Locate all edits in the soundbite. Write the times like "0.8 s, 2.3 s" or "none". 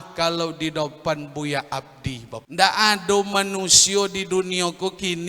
2.4 s